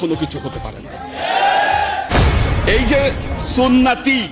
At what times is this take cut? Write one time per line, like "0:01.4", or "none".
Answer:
0:02.1